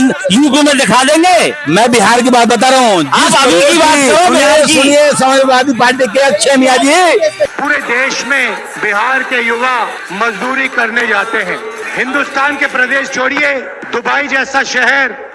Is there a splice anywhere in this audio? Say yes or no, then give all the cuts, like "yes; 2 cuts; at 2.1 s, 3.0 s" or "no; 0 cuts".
yes; 1 cut; at 7.5 s